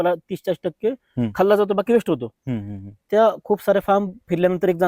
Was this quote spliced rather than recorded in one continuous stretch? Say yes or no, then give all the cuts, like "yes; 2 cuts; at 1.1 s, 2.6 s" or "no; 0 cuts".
no; 0 cuts